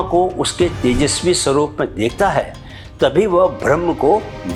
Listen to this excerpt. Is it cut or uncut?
uncut